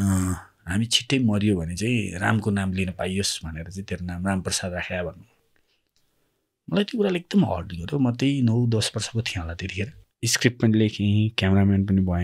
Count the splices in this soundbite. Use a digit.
1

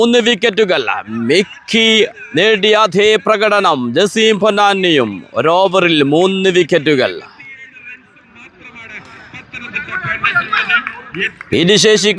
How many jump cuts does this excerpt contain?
0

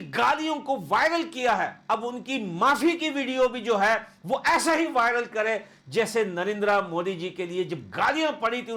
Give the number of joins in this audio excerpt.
0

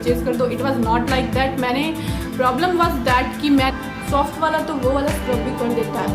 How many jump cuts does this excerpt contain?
1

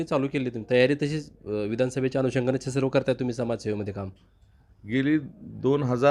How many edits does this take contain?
0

